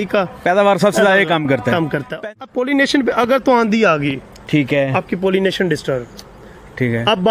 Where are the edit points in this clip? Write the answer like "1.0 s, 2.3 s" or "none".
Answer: 2.4 s